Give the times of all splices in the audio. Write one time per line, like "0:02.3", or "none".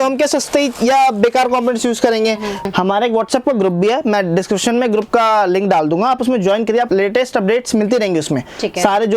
0:02.6
0:06.9